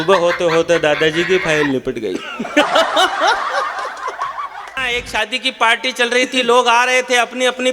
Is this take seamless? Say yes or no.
no